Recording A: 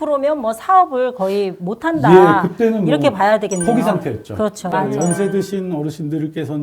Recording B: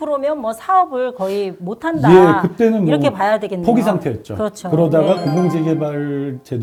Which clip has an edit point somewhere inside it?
A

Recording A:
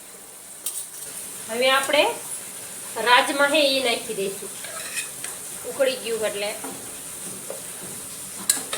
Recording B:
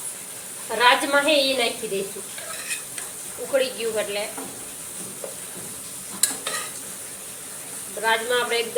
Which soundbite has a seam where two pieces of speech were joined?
A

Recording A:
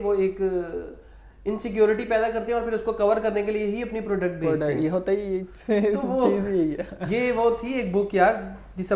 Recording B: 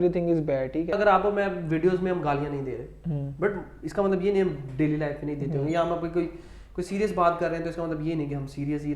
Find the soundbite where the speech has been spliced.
B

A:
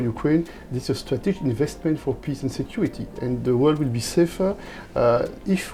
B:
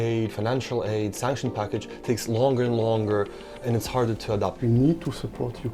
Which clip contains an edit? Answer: B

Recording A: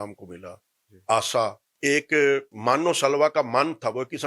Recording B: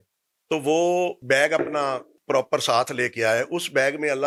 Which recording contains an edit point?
A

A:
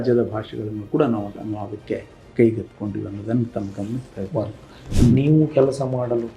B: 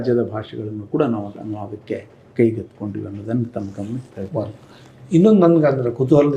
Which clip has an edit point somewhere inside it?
A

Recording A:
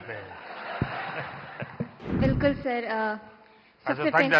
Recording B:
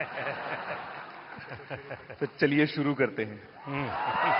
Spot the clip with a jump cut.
A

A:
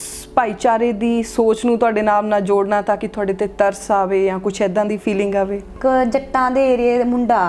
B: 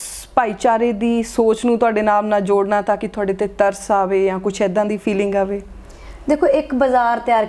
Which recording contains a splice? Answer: A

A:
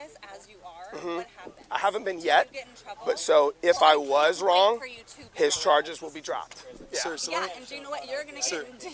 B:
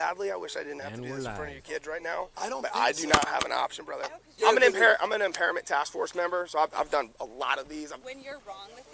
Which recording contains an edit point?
B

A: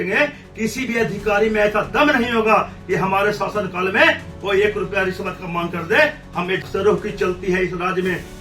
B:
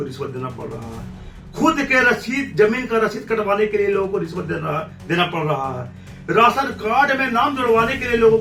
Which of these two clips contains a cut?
A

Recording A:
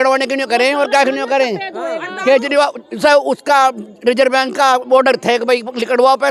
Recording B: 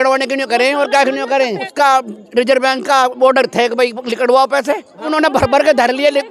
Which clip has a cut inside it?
B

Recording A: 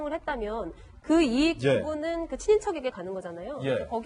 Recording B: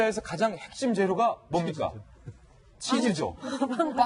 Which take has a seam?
B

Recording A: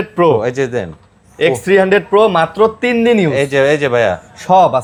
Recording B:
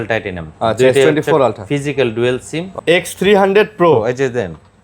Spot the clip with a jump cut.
B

